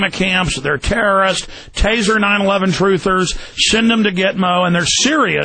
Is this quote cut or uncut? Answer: cut